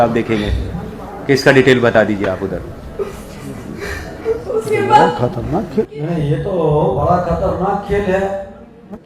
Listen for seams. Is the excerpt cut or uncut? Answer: cut